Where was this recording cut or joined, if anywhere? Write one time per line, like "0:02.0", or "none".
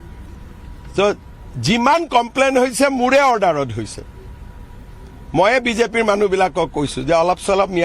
0:05.7